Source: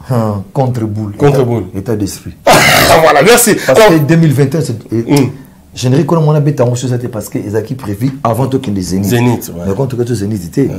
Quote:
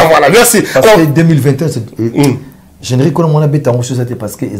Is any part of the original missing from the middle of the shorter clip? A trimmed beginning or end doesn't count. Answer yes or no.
no